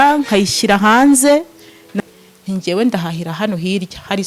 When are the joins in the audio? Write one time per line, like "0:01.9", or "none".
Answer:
0:01.9